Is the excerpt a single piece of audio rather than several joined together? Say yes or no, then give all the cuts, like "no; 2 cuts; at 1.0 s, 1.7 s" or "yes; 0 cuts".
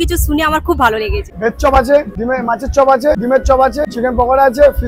no; 4 cuts; at 1.3 s, 2.1 s, 3.2 s, 3.9 s